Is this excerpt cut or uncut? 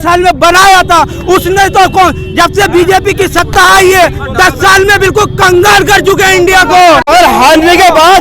cut